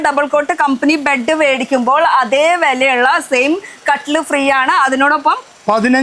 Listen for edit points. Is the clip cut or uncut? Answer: uncut